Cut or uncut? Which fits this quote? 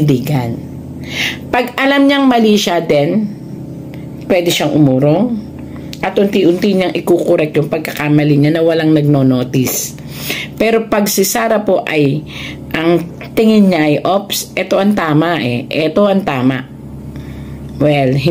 uncut